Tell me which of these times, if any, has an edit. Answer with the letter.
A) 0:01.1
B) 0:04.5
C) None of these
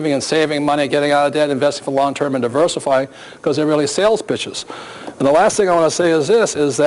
B